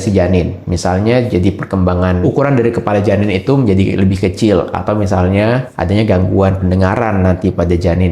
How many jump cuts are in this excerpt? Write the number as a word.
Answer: zero